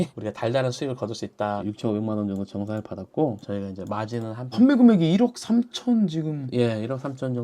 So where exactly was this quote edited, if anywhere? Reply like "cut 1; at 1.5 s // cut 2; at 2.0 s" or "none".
cut 1; at 1.6 s // cut 2; at 4.5 s